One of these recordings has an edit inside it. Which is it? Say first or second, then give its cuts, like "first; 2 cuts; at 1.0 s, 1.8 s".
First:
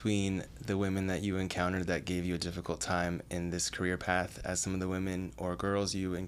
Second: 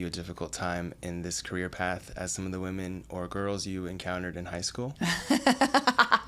second; 1 cut; at 4.9 s